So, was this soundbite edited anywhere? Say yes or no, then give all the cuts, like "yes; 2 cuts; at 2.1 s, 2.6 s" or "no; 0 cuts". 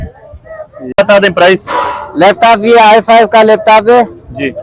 yes; 1 cut; at 0.9 s